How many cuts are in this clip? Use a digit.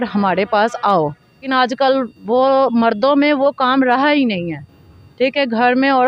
1